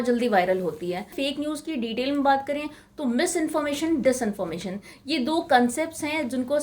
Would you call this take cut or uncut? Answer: cut